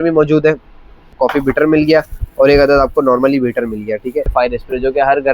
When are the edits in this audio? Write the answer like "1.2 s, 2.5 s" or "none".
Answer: 1.1 s, 4.3 s